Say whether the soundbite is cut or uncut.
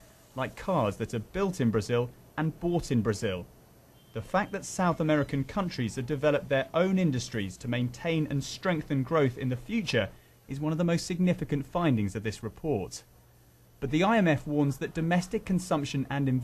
uncut